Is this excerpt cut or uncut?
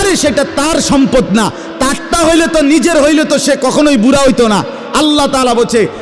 uncut